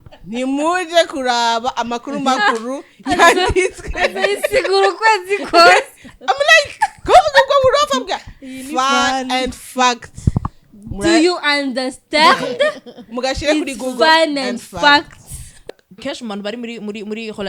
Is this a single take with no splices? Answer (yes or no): no